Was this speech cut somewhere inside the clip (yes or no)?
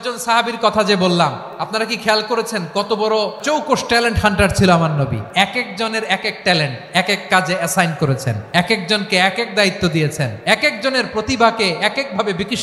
yes